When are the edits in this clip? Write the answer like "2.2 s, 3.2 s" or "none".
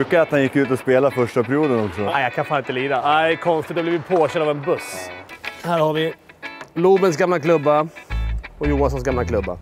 2.1 s, 4.9 s